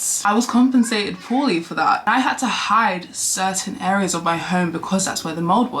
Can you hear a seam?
yes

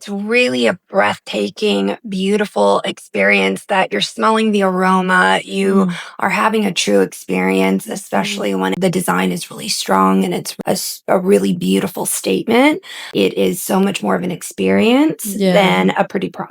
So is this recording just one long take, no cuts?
no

